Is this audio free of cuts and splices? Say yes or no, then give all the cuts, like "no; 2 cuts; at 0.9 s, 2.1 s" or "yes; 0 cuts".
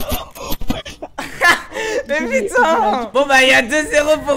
yes; 0 cuts